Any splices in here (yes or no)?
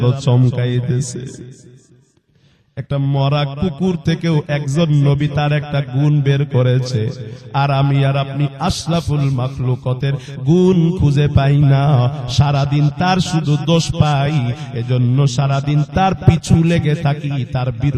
no